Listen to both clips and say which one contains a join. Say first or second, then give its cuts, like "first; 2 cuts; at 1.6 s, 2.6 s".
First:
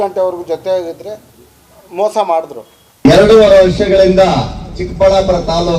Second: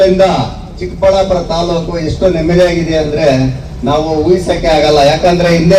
first; 1 cut; at 2.9 s